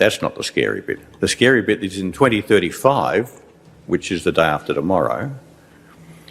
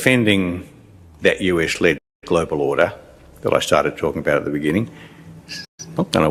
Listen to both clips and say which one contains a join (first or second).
first